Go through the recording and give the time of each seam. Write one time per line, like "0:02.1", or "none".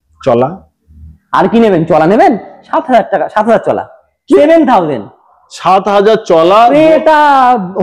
none